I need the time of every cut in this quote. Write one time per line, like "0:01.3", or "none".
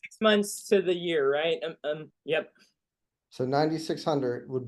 none

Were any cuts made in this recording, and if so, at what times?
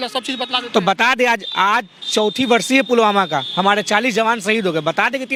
none

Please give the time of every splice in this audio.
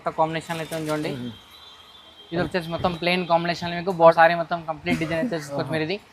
0:04.1

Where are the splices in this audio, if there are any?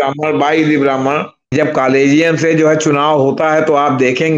0:01.5

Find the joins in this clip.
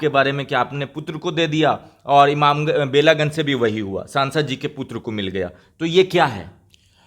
none

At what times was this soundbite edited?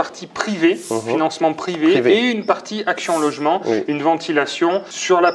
none

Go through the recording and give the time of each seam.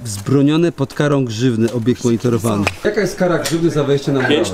0:02.7

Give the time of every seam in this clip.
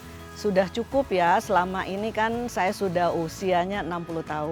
none

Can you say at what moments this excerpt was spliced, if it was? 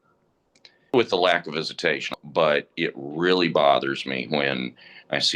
0:00.9
0:02.1

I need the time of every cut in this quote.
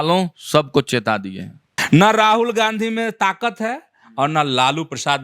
0:01.7

